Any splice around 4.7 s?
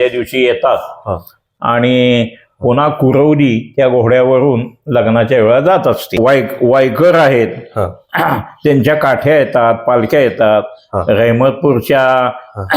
no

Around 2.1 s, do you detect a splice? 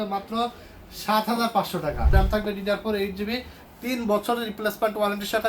yes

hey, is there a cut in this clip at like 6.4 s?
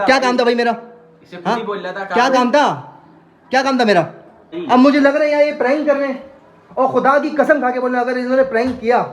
no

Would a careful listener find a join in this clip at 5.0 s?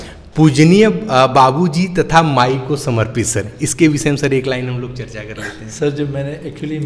no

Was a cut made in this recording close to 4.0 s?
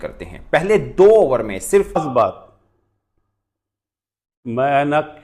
no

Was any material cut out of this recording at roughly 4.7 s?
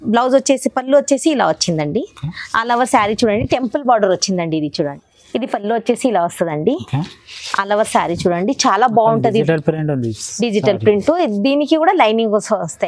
yes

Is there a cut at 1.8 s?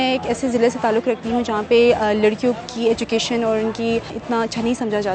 no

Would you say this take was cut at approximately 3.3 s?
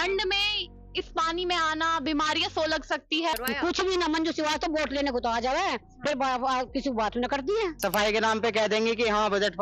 yes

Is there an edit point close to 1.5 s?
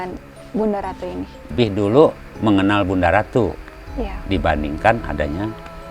yes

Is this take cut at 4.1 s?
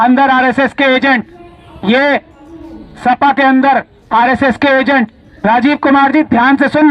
no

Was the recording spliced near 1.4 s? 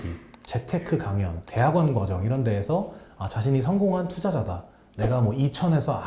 yes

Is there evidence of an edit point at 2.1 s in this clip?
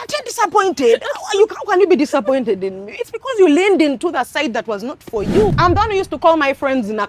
no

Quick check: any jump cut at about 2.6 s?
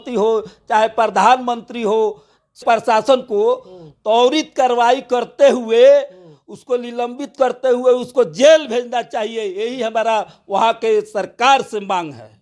yes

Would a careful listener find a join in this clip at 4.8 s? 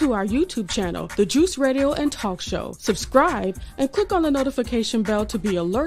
no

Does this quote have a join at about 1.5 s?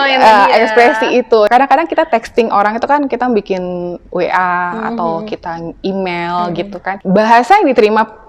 yes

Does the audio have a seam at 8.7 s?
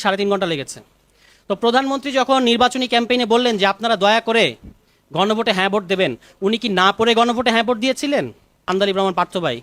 yes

